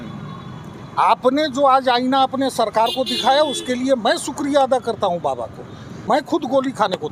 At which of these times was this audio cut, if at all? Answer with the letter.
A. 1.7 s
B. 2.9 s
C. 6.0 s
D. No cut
C